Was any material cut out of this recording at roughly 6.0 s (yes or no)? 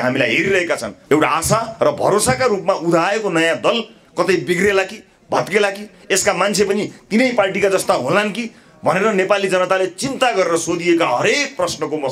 no